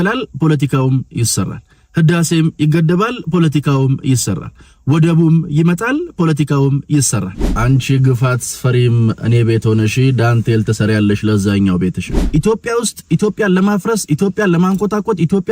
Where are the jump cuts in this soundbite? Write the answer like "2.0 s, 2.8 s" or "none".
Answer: 7.5 s, 12.2 s